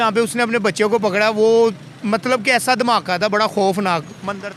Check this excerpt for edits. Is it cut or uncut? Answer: uncut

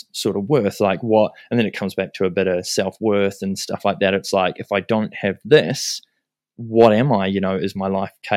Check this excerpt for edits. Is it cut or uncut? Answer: uncut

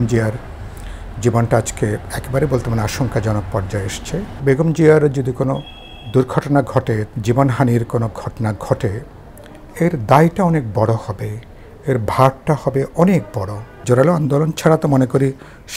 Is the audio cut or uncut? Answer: cut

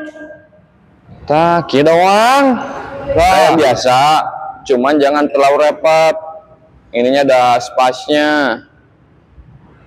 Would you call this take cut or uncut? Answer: cut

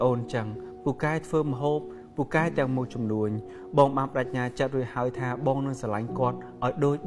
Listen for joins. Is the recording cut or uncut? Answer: uncut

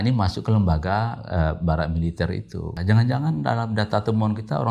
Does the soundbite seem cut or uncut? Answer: cut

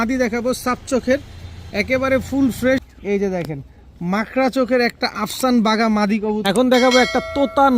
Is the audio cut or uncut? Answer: cut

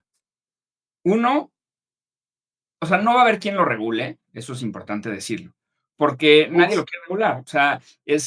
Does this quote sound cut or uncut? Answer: uncut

